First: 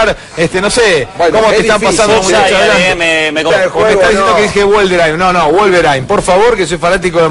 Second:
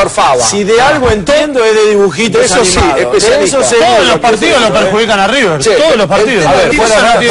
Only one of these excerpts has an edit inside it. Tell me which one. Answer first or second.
first